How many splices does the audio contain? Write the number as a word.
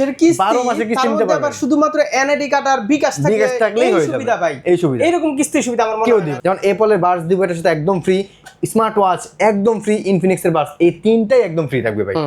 one